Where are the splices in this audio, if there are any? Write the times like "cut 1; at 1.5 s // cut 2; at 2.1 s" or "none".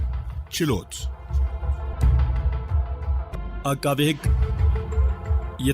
cut 1; at 0.9 s